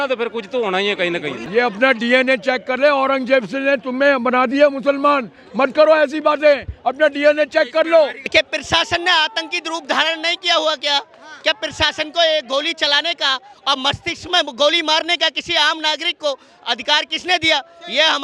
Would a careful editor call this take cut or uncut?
cut